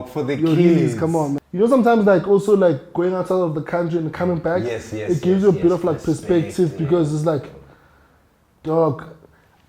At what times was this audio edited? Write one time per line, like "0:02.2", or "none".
0:01.4